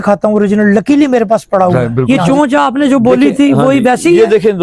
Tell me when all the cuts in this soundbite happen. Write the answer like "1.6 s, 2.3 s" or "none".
2.0 s